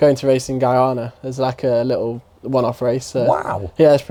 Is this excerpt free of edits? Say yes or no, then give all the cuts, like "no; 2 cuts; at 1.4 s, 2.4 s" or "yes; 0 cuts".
yes; 0 cuts